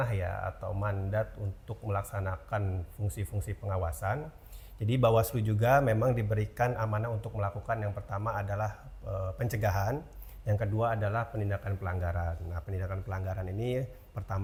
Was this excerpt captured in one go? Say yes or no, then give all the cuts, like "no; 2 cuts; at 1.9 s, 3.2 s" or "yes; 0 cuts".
yes; 0 cuts